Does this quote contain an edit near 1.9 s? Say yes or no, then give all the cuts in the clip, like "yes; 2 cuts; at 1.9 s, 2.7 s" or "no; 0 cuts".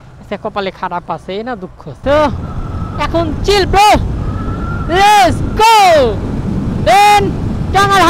yes; 1 cut; at 1.9 s